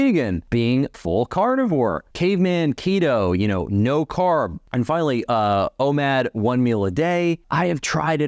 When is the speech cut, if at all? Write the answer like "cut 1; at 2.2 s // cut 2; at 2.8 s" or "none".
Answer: cut 1; at 0.8 s // cut 2; at 2.1 s // cut 3; at 4.6 s // cut 4; at 7.5 s